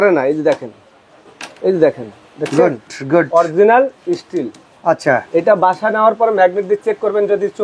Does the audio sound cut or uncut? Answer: uncut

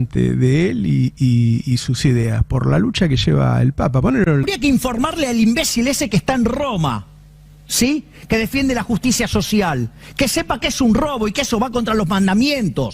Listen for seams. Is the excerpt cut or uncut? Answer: cut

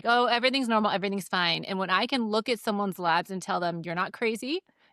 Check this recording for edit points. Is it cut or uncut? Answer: uncut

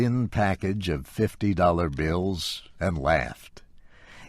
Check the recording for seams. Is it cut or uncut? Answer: cut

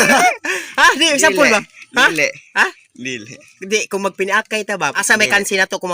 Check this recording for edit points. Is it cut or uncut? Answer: cut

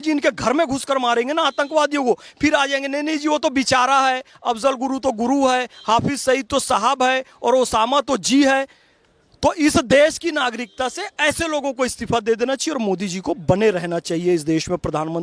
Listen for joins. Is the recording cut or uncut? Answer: uncut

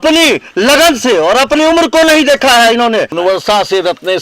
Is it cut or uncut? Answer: cut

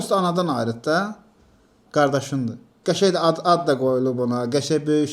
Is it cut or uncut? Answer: cut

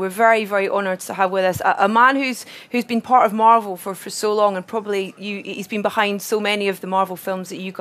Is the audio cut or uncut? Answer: uncut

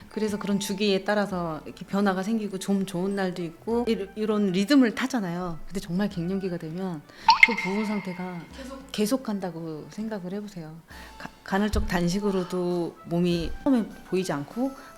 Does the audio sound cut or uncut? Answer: uncut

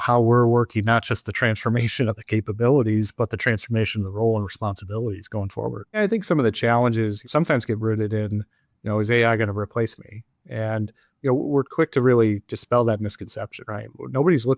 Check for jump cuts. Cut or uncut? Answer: cut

